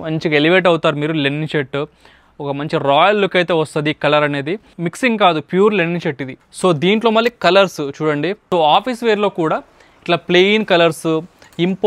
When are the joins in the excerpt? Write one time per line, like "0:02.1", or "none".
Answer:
0:04.6
0:06.4
0:08.4